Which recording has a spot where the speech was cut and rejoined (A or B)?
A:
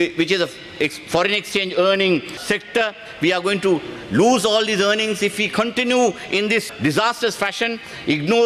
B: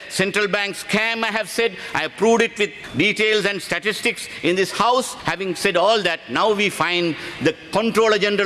B